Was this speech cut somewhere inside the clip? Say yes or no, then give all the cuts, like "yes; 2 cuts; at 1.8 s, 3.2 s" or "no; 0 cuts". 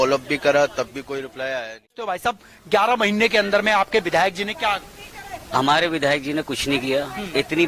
yes; 1 cut; at 2.2 s